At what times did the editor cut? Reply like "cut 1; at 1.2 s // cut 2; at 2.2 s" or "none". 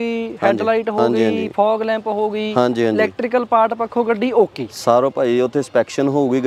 none